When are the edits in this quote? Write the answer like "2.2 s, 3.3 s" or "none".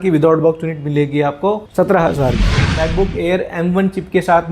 2.6 s